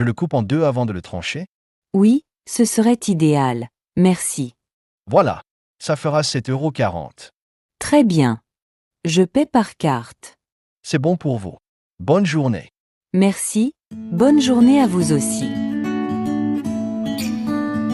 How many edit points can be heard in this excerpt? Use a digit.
1